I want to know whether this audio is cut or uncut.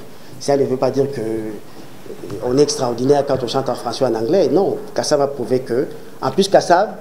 uncut